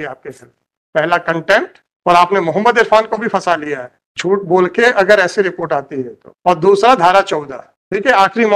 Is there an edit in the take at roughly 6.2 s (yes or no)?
no